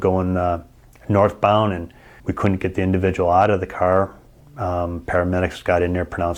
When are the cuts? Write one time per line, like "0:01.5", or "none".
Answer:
0:02.1